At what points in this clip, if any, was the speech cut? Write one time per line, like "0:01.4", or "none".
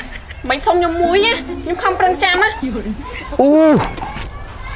0:02.5